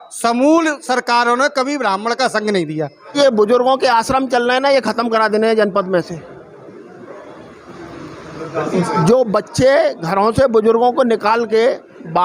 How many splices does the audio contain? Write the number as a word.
one